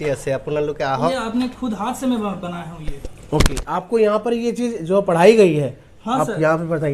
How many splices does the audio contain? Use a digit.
1